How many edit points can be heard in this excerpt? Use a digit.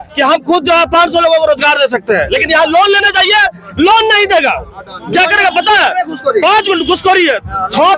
0